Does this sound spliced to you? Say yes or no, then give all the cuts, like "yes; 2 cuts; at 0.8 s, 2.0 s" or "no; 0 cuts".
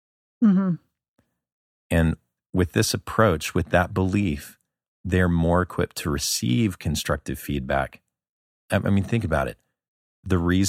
yes; 1 cut; at 2.3 s